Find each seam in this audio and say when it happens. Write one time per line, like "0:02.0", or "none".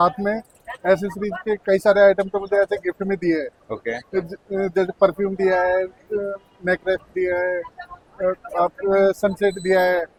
none